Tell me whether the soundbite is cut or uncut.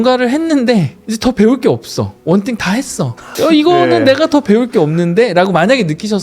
cut